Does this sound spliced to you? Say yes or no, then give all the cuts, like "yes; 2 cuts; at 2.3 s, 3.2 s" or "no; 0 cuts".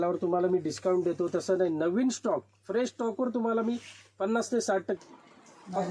yes; 1 cut; at 5.0 s